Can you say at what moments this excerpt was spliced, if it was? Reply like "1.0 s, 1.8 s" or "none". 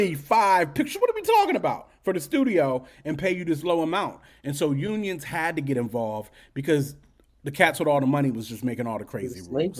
none